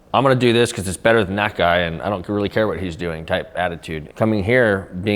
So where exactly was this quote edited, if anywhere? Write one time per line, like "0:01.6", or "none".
0:04.1

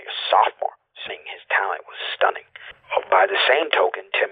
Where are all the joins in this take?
0:01.1
0:02.8

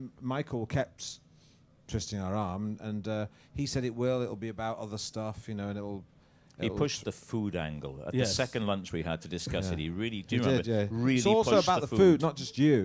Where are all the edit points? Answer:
none

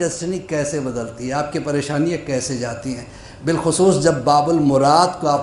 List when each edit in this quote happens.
none

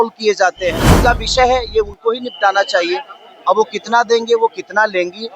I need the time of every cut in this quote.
0:00.9

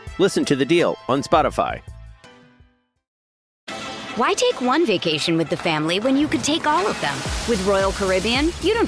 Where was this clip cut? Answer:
0:03.5

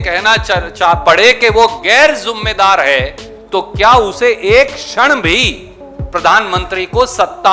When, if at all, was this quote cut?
none

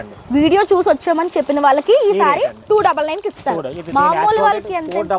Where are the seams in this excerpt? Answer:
none

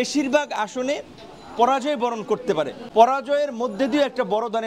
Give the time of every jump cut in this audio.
0:02.8

